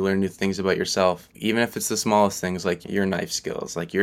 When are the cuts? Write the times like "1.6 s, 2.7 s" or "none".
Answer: none